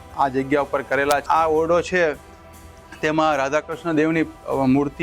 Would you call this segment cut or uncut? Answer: cut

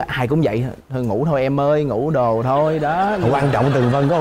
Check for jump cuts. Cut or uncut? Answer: uncut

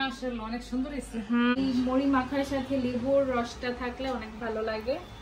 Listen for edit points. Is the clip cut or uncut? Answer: cut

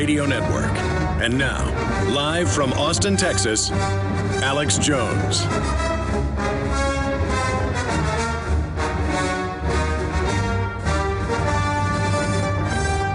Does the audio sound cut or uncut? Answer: uncut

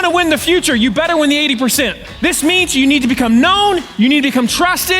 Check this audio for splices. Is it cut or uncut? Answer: cut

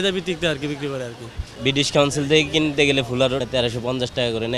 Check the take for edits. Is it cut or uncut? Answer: cut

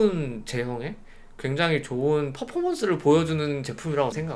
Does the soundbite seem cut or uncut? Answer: uncut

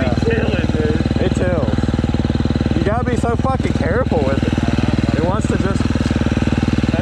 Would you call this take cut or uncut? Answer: uncut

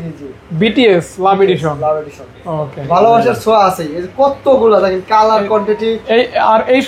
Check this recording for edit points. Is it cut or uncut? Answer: uncut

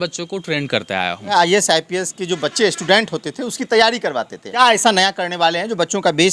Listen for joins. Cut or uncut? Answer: cut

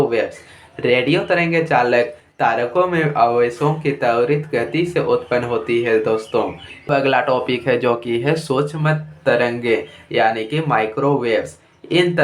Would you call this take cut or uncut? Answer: cut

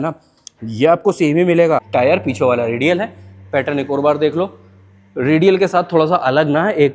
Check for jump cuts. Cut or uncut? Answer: cut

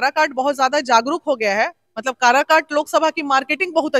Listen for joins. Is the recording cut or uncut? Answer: uncut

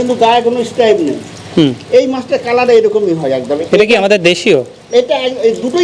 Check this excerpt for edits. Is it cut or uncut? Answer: uncut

